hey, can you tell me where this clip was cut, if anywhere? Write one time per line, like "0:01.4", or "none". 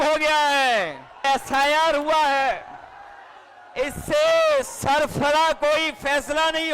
0:01.2